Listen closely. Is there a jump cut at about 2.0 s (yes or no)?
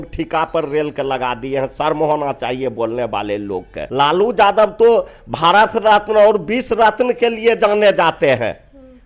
no